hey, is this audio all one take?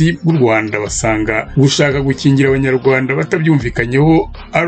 no; 1 cut; at 1.5 s

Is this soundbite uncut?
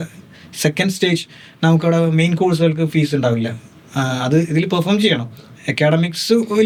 yes; 0 cuts

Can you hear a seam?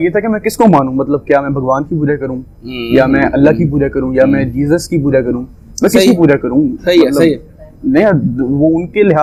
no; 0 cuts

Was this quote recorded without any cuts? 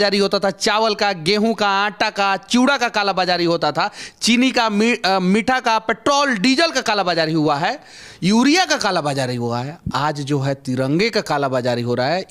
yes; 0 cuts

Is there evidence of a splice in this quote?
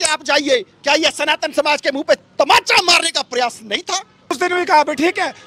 yes; 1 cut; at 4.4 s

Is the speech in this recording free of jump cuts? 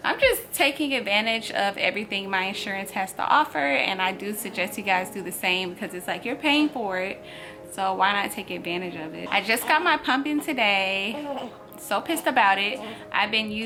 yes; 0 cuts

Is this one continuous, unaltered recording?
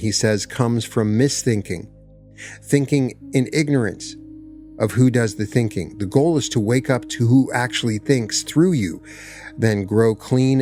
yes; 0 cuts

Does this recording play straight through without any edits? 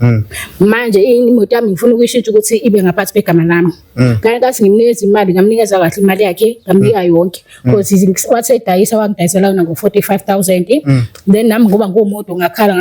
yes; 0 cuts

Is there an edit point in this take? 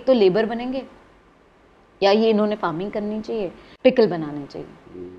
yes; 1 cut; at 3.6 s

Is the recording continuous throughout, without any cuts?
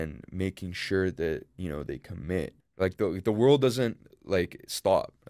no; 1 cut; at 2.6 s

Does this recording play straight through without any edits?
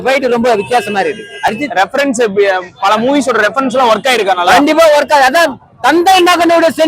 yes; 0 cuts

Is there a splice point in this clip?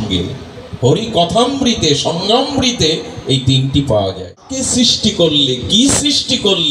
yes; 1 cut; at 4.5 s

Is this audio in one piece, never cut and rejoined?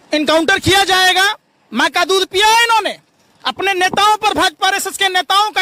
yes; 0 cuts

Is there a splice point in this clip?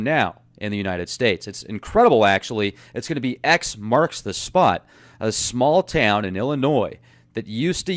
yes; 1 cut; at 2.4 s

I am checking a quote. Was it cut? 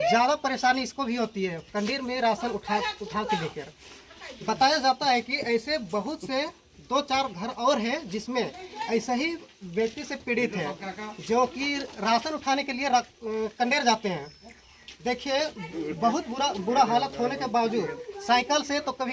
no; 0 cuts

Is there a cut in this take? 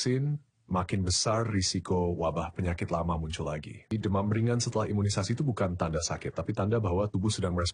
yes; 1 cut; at 3.9 s

